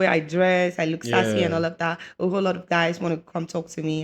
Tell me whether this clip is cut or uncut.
uncut